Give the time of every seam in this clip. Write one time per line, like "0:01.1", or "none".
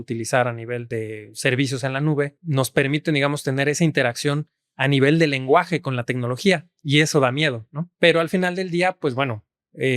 0:00.8
0:02.4
0:07.8